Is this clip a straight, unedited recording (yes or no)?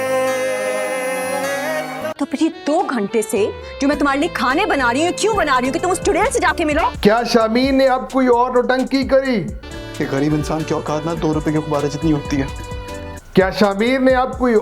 no